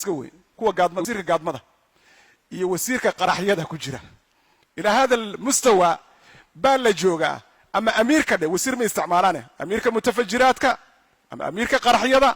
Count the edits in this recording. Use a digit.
1